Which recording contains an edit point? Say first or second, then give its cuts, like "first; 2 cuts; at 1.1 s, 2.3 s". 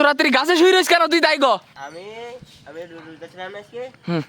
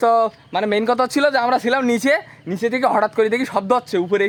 first; 1 cut; at 1.7 s